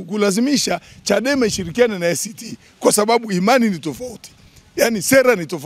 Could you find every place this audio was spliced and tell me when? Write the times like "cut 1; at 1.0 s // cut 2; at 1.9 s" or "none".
none